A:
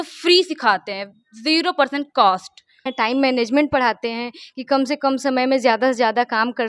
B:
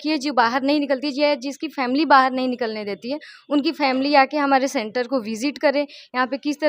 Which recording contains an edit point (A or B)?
A